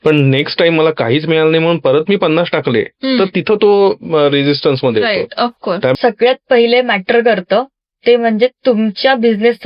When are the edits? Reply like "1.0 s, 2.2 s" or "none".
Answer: 5.9 s